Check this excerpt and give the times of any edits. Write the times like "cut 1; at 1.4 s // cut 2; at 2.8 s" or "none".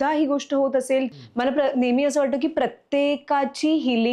cut 1; at 1.1 s